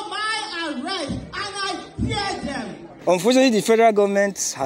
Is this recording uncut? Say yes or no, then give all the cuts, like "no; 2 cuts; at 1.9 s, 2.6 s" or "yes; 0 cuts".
no; 1 cut; at 2.9 s